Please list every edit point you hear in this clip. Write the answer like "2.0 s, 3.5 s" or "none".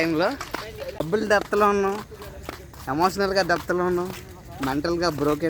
1.1 s